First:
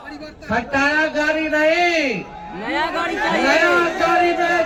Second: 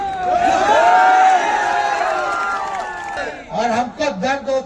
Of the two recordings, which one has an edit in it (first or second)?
second